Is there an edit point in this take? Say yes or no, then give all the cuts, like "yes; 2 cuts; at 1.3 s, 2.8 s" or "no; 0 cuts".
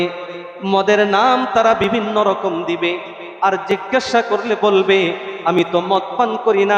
no; 0 cuts